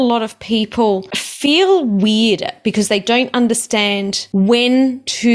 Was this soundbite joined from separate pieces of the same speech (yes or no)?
yes